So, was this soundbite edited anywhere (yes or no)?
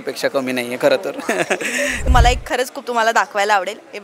yes